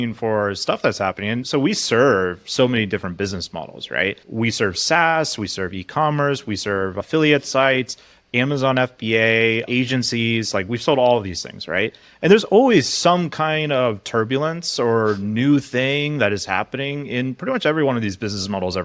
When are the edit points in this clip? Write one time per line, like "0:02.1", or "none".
0:01.4
0:04.2

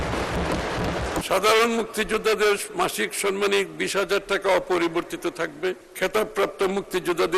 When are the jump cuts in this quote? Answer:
0:01.2
0:05.9

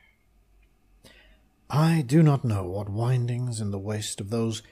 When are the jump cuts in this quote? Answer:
0:01.6

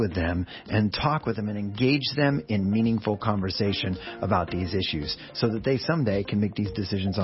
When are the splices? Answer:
none

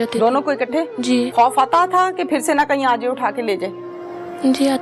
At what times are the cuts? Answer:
0:01.3

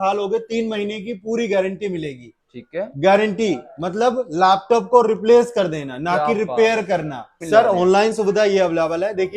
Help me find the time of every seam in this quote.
0:07.4

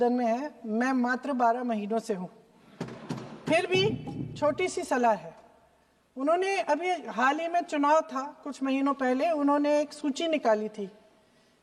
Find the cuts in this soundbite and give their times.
none

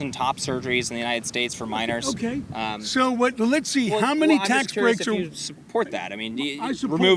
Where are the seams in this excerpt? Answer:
none

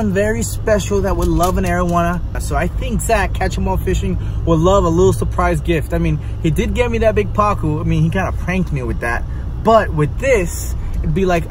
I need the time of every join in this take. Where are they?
none

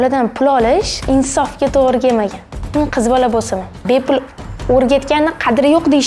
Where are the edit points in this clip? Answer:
0:00.9
0:03.8

